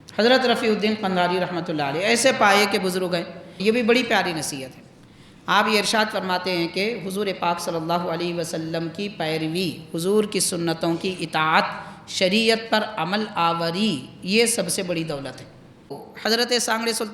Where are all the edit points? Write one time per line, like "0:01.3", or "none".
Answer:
0:03.4
0:16.1